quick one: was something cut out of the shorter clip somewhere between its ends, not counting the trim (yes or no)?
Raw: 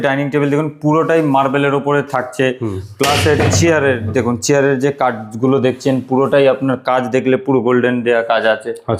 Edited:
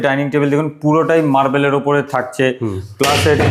no